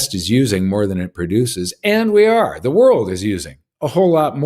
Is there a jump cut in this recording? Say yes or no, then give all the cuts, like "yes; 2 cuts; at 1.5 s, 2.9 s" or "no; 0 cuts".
no; 0 cuts